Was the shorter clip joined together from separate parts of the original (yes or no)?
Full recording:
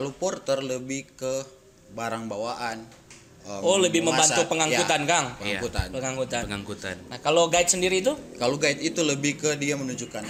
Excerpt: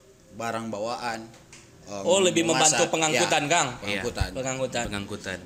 no